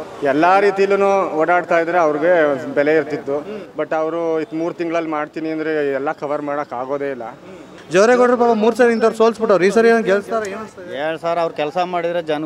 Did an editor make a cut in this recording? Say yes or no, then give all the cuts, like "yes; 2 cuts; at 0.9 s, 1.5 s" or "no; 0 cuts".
yes; 1 cut; at 7.7 s